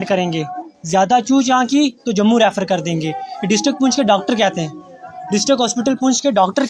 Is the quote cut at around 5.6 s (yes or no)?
no